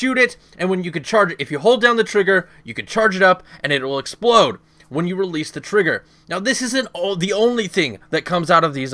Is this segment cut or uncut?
uncut